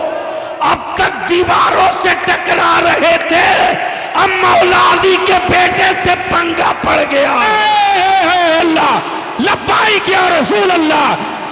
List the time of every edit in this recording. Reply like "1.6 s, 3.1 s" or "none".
8.6 s